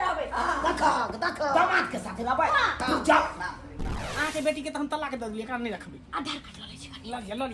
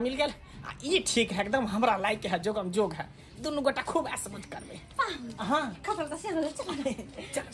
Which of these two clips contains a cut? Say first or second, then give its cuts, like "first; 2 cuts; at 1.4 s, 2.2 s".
first; 1 cut; at 3.9 s